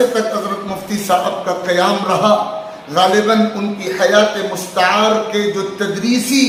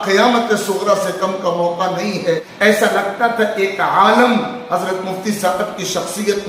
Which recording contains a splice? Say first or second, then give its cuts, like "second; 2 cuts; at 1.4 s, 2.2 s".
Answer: second; 1 cut; at 2.5 s